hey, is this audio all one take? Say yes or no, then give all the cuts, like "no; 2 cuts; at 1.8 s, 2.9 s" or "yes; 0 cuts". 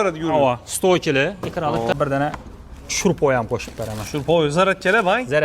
no; 1 cut; at 1.9 s